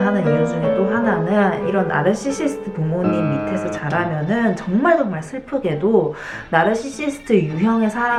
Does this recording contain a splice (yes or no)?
no